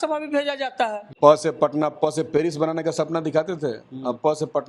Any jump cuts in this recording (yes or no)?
yes